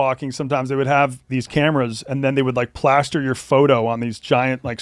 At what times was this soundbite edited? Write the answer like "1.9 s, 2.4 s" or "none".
none